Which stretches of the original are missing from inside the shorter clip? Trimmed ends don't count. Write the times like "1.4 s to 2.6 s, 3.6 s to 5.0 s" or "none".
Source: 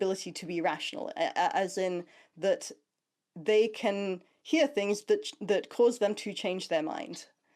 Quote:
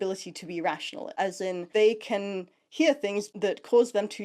1.1 s to 2.8 s, 5.0 s to 5.3 s